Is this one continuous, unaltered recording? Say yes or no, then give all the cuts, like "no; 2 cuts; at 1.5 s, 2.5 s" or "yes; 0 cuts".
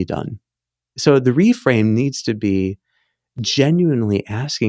no; 1 cut; at 1.0 s